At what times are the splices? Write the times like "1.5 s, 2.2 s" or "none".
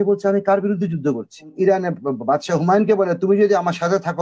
1.5 s

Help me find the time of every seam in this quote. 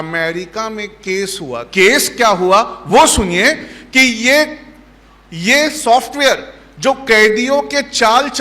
1.6 s

